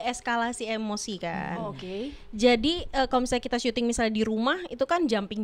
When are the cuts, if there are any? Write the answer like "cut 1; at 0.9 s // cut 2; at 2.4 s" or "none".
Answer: none